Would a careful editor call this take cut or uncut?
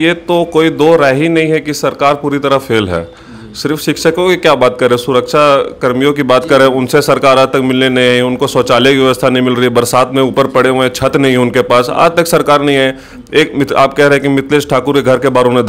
uncut